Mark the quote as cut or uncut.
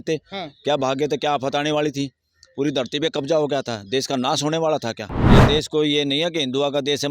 cut